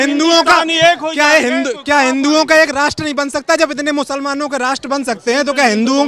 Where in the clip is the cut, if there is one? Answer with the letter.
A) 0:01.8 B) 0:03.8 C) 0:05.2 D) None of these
D